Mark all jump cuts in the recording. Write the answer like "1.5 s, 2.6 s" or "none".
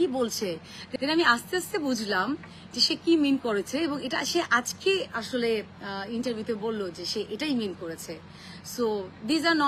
none